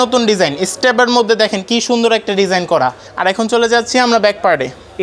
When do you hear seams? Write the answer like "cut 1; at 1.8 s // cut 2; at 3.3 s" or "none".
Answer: none